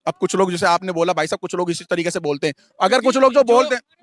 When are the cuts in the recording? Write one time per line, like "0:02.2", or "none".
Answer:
none